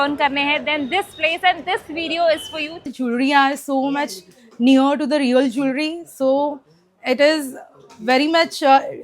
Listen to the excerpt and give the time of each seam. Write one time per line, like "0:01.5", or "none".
0:02.9